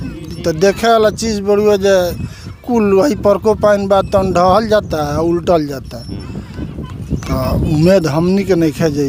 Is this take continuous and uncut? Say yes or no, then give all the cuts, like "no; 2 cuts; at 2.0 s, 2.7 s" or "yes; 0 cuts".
yes; 0 cuts